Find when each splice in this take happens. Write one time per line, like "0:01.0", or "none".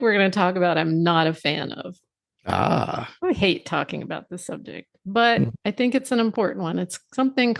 0:03.4